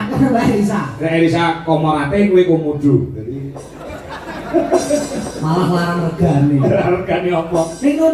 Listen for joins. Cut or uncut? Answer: uncut